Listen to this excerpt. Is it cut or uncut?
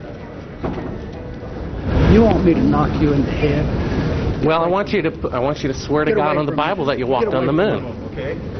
uncut